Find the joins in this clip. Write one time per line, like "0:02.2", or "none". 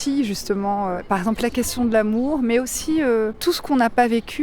0:01.0
0:03.4